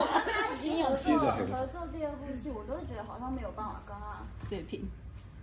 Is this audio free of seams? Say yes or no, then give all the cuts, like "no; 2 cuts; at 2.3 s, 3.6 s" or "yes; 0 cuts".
yes; 0 cuts